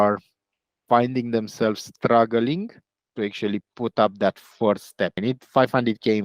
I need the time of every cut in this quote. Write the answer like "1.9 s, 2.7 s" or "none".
5.2 s